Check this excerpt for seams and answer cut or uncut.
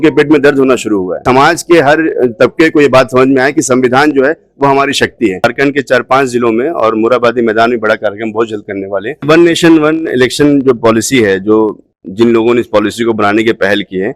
cut